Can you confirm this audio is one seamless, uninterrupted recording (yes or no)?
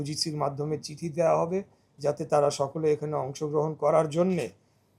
yes